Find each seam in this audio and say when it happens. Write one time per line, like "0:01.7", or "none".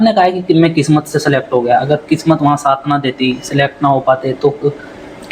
none